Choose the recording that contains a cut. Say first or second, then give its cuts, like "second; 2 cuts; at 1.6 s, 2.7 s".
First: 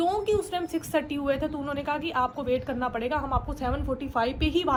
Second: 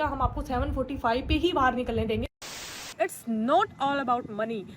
second; 1 cut; at 2.8 s